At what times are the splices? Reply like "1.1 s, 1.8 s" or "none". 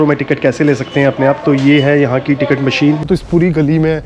3.0 s

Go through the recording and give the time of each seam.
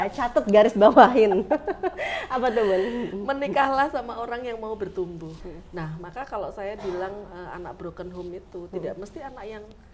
5.4 s

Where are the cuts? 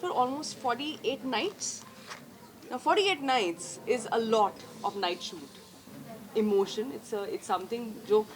5.9 s

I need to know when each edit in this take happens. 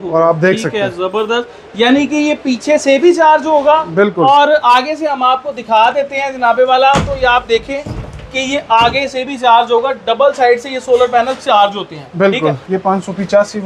12.6 s

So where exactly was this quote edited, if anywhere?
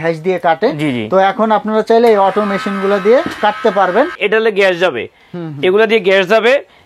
4.2 s

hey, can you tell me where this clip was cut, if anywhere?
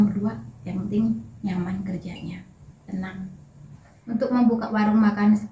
3.9 s

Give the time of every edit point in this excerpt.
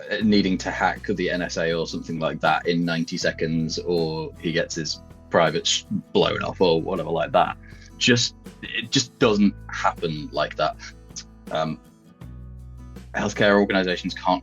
10.9 s

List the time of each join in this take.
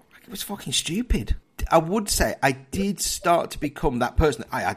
1.4 s

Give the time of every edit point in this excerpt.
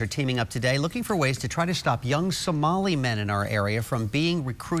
none

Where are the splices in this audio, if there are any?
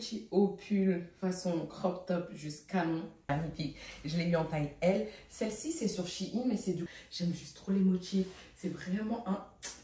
3.3 s, 6.8 s

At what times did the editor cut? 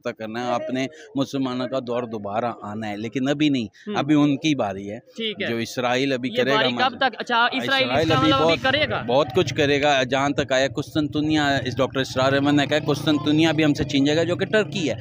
none

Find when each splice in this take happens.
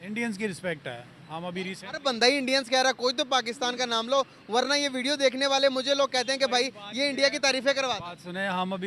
none

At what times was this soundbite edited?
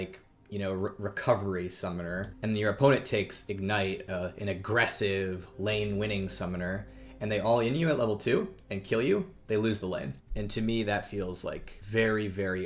2.3 s, 10.2 s, 11.7 s

